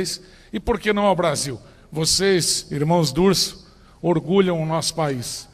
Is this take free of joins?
no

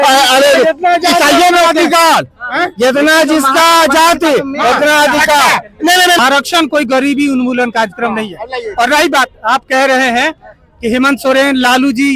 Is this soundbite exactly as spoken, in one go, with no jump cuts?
no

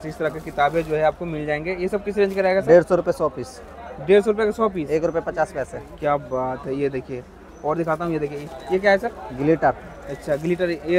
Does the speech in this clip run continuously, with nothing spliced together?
yes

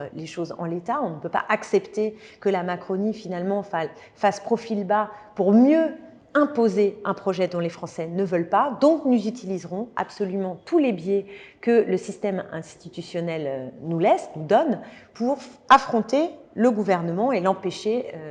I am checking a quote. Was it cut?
no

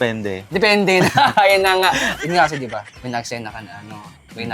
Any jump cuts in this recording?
yes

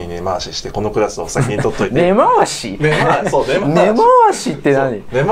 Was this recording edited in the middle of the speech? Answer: no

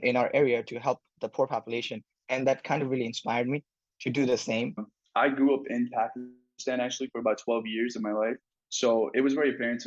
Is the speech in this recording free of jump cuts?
no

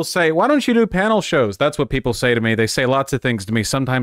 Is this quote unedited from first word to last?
yes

